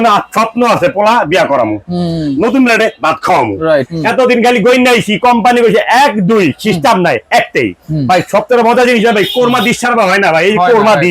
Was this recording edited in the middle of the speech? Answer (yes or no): yes